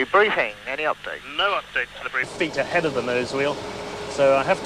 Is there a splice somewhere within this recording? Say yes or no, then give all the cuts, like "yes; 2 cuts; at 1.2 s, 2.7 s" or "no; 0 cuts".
no; 0 cuts